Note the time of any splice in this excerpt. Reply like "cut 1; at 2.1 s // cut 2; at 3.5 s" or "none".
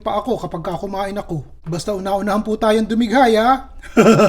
cut 1; at 1.5 s